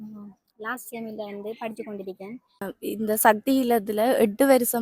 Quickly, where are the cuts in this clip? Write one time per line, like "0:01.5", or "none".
0:02.7